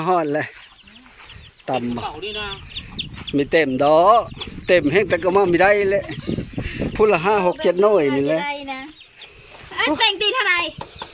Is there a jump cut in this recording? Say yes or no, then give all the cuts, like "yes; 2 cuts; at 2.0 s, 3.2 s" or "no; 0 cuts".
no; 0 cuts